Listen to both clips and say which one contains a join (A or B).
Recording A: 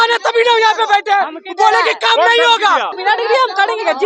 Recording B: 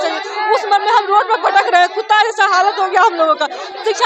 A